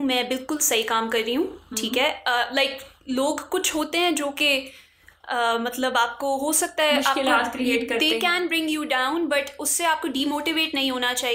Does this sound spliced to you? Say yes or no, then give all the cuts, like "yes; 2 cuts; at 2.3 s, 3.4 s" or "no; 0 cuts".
no; 0 cuts